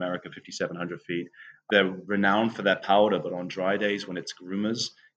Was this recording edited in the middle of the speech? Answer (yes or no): yes